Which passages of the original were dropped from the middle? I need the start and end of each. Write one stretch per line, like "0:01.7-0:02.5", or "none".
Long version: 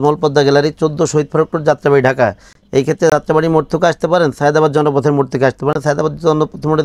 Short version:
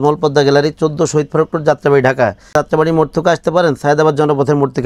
0:02.5-0:03.1